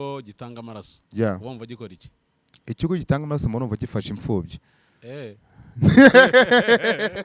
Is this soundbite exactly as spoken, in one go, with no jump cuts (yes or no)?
yes